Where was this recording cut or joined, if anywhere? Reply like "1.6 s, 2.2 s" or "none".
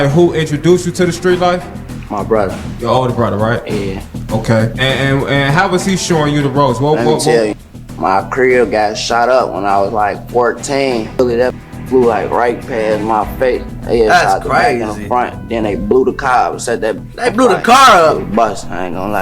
11.2 s

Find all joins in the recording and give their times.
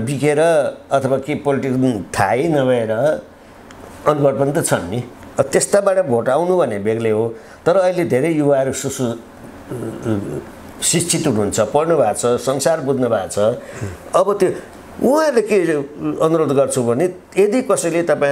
none

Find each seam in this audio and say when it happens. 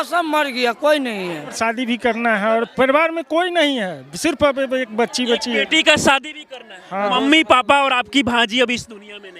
1.5 s, 7.1 s

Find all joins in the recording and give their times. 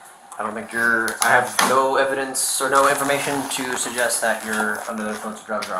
none

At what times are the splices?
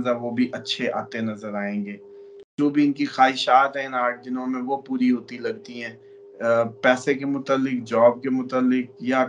2.5 s

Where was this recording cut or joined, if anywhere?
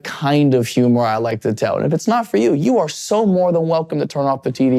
none

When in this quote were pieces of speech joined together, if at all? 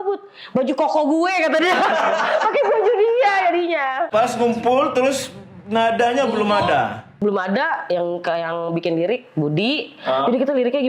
4.1 s

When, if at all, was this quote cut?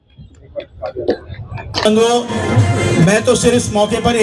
1.9 s

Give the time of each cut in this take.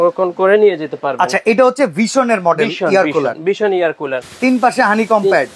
4.2 s

